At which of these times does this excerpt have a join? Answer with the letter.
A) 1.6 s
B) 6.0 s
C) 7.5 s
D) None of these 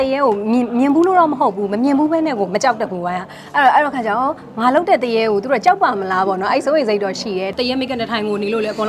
C